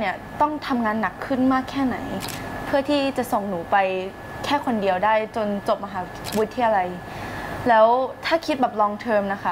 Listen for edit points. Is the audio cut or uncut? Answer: uncut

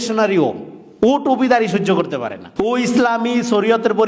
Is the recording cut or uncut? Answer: cut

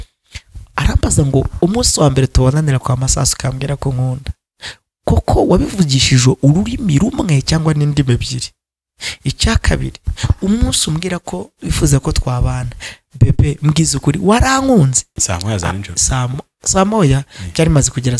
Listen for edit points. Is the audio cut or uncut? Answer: cut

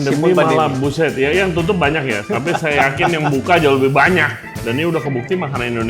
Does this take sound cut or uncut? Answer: cut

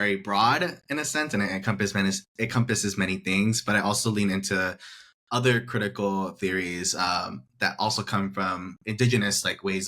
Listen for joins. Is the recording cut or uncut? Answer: uncut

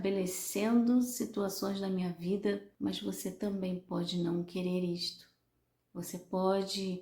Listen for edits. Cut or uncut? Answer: cut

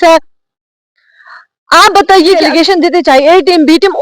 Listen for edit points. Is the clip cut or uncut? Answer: cut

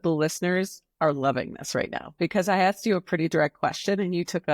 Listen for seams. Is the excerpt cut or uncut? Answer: uncut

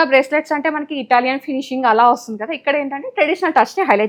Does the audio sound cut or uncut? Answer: uncut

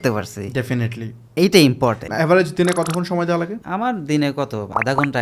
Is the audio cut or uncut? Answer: cut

